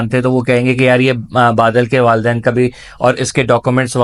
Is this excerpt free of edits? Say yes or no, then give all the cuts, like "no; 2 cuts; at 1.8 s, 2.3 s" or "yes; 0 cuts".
yes; 0 cuts